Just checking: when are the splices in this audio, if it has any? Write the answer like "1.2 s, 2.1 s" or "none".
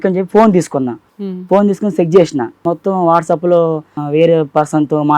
1.0 s, 2.6 s, 4.0 s